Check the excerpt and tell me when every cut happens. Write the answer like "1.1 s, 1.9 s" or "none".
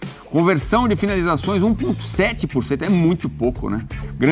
none